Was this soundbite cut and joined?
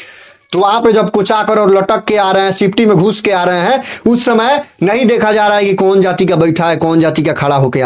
no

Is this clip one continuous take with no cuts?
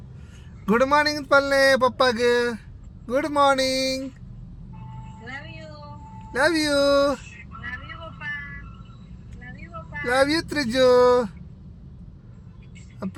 yes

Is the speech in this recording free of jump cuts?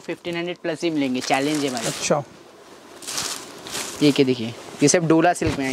yes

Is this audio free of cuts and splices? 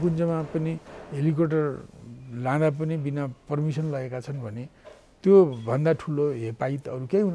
yes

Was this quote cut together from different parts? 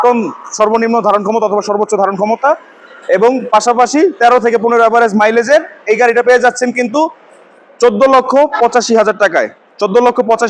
no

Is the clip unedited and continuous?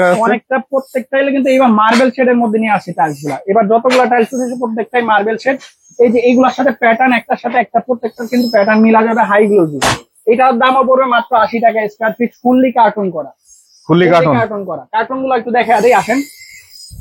yes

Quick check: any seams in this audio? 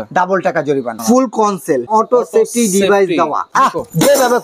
yes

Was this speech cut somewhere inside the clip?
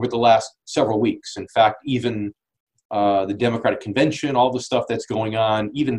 no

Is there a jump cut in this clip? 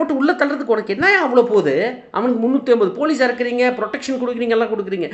no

